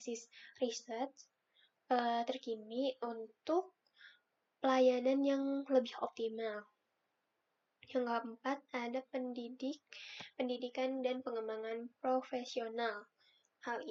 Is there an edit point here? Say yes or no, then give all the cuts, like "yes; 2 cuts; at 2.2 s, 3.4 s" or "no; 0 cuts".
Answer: no; 0 cuts